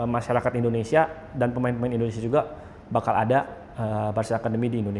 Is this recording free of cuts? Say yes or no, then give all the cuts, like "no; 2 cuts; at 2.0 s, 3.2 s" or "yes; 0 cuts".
yes; 0 cuts